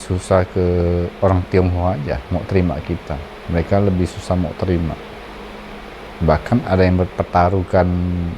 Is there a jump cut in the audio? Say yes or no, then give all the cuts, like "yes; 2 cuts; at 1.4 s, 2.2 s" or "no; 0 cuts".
yes; 1 cut; at 6.0 s